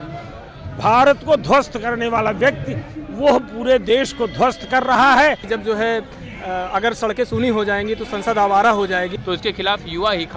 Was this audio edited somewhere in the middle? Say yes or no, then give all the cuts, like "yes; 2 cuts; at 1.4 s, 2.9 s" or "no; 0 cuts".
yes; 2 cuts; at 5.4 s, 9.2 s